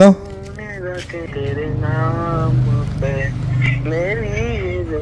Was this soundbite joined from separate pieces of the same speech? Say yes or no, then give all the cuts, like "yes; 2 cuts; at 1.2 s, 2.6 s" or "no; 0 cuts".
yes; 1 cut; at 1.3 s